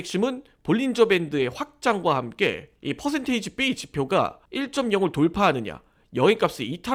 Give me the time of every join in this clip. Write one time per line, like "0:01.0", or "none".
none